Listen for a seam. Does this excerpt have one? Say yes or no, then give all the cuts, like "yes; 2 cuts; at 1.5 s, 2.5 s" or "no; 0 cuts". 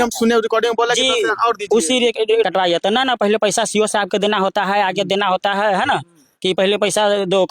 yes; 1 cut; at 2.4 s